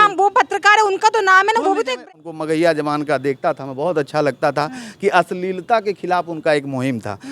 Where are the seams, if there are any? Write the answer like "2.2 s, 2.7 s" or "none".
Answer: 2.1 s